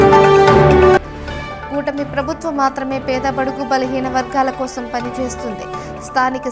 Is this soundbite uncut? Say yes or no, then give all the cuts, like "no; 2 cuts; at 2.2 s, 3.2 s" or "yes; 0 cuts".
no; 1 cut; at 1.0 s